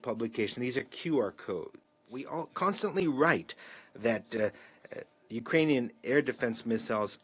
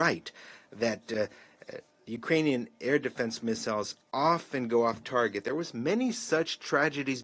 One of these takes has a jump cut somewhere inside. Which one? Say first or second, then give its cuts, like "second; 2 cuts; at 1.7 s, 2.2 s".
first; 1 cut; at 2.3 s